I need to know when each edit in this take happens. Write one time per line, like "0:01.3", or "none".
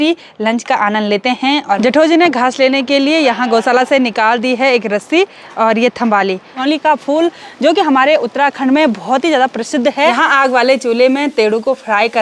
0:01.8
0:06.5
0:10.2